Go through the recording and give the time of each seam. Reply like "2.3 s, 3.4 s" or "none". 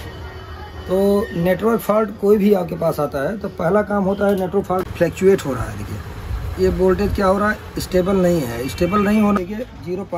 4.8 s, 9.4 s